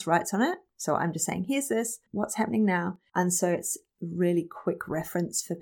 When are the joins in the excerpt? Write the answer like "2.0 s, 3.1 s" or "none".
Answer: 2.0 s, 3.0 s